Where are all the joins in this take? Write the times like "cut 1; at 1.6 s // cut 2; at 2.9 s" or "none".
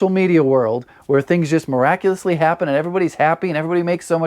none